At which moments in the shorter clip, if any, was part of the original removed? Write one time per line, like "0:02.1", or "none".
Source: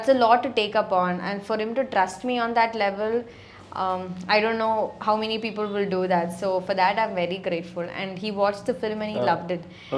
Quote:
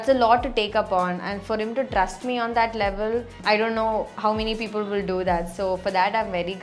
0:03.3